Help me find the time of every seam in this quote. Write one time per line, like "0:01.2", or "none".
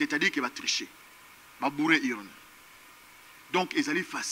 none